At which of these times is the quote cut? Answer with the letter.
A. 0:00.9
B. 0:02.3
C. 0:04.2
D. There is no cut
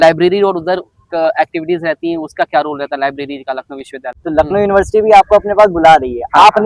C